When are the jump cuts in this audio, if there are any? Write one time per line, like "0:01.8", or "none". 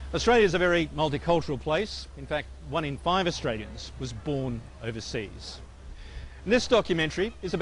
none